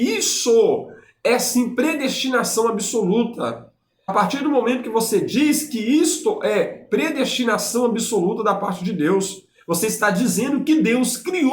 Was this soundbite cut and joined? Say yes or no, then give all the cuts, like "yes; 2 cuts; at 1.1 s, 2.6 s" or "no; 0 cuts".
yes; 1 cut; at 4.1 s